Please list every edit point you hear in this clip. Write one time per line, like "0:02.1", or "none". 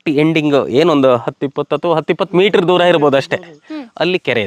none